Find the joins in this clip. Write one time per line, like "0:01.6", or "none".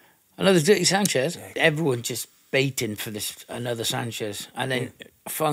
0:01.5